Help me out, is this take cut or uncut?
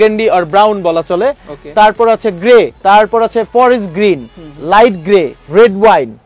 uncut